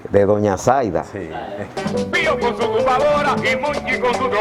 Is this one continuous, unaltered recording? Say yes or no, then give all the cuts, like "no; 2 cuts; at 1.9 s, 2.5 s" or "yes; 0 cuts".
no; 1 cut; at 1.8 s